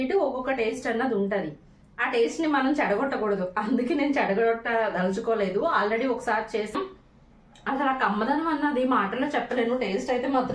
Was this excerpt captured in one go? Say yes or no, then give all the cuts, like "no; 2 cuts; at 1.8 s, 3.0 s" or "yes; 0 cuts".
no; 1 cut; at 6.8 s